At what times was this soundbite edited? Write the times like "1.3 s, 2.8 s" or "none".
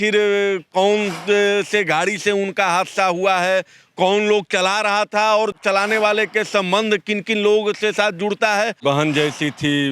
8.8 s